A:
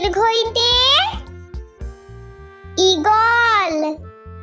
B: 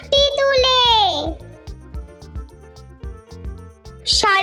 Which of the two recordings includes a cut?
A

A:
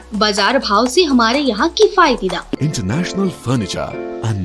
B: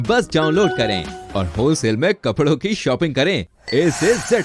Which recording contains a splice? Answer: A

